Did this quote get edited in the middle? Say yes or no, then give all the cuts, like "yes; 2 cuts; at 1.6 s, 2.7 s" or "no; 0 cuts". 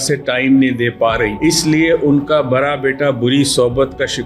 yes; 1 cut; at 1.3 s